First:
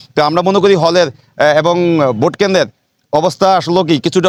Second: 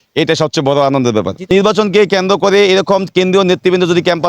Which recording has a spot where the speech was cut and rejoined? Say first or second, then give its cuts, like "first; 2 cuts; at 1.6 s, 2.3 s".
second; 1 cut; at 1.5 s